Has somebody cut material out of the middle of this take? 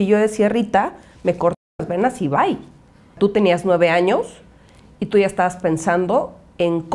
yes; 1 cut; at 3.2 s

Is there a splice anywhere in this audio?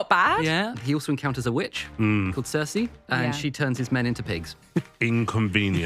yes; 4 cuts; at 0.8 s, 1.8 s, 3.0 s, 4.7 s

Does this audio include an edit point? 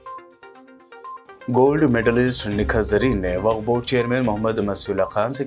yes; 1 cut; at 1.1 s

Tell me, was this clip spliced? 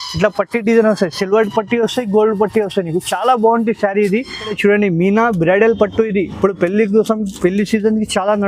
yes; 1 cut; at 4.4 s

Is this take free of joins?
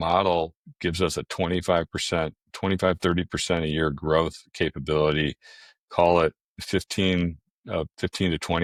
yes; 0 cuts

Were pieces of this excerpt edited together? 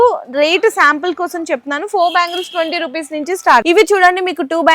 yes; 1 cut; at 3.6 s

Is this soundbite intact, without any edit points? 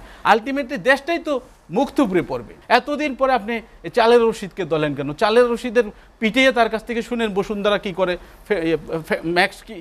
no; 1 cut; at 2.5 s

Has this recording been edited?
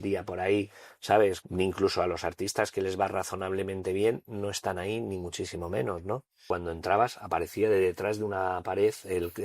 yes; 2 cuts; at 1.4 s, 6.4 s

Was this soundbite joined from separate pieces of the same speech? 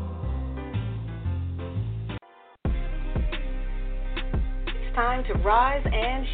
yes; 1 cut; at 2.2 s

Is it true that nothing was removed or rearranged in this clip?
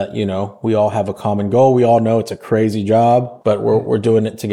no; 1 cut; at 3.3 s

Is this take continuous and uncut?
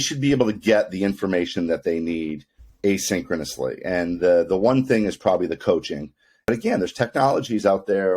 no; 1 cut; at 6.4 s

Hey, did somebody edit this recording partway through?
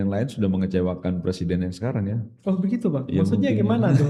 no; 0 cuts

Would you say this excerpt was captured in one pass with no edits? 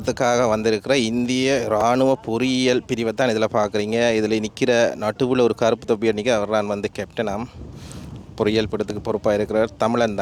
yes; 0 cuts

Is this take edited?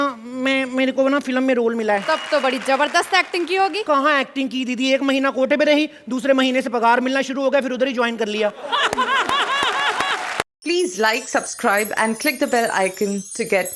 yes; 3 cuts; at 2.0 s, 3.8 s, 10.5 s

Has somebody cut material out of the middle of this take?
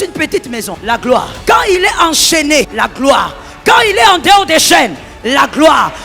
yes; 2 cuts; at 1.0 s, 2.7 s

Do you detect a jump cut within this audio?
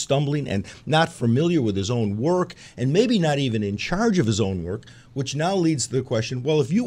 no; 0 cuts

